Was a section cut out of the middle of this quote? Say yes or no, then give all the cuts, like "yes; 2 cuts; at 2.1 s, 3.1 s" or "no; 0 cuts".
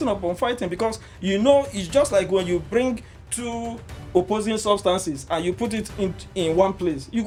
no; 0 cuts